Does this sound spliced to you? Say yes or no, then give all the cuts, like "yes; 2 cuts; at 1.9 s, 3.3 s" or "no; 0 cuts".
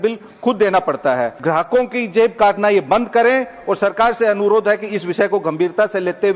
yes; 1 cut; at 1.4 s